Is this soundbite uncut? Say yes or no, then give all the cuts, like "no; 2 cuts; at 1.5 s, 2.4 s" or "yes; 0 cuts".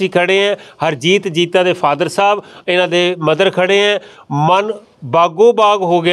yes; 0 cuts